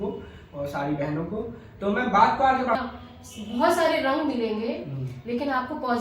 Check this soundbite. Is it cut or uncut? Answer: cut